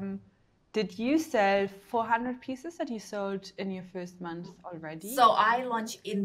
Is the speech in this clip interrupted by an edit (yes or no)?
yes